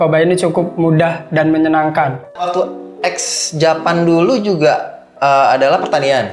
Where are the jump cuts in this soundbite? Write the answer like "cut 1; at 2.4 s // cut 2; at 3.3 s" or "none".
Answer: cut 1; at 2.4 s